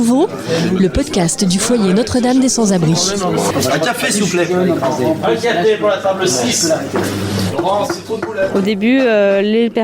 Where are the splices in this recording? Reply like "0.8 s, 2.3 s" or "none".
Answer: 8.5 s